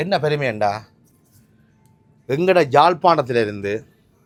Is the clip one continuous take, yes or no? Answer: yes